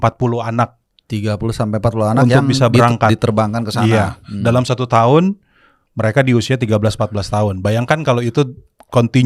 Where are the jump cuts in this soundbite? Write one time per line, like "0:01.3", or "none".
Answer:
none